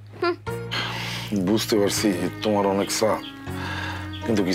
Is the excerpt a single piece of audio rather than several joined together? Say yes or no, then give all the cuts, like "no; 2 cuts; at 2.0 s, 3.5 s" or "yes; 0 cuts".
yes; 0 cuts